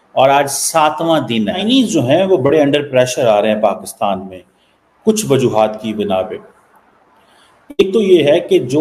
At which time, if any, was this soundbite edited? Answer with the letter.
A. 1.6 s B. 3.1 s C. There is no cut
A